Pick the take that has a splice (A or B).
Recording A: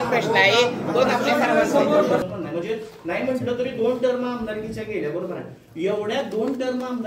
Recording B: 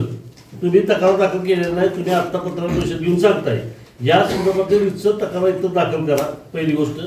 A